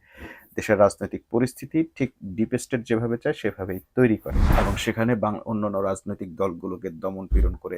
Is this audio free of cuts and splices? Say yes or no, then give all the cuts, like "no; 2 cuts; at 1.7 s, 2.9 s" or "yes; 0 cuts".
no; 1 cut; at 4.4 s